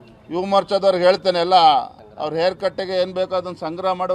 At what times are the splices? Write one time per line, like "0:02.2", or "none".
0:02.0